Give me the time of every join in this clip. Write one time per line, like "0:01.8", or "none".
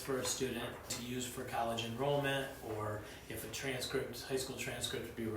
0:01.0